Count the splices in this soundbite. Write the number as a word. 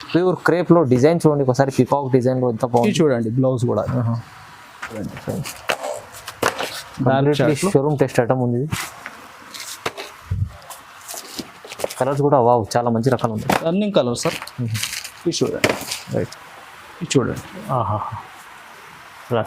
two